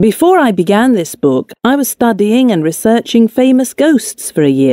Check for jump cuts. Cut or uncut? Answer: uncut